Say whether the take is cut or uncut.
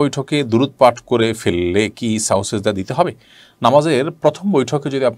uncut